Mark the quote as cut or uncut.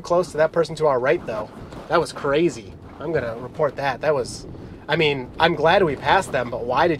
uncut